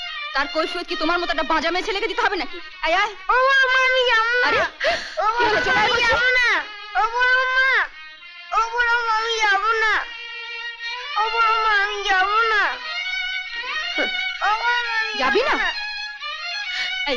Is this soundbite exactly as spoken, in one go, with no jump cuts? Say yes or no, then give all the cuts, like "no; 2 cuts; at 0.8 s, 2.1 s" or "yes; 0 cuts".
yes; 0 cuts